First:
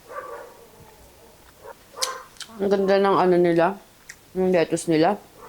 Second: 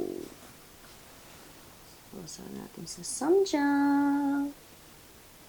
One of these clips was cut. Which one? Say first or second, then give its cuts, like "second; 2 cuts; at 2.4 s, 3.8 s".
first; 1 cut; at 1.7 s